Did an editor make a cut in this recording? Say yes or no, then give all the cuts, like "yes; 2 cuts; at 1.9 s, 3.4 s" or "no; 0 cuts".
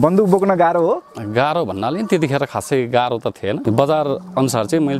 yes; 1 cut; at 3.6 s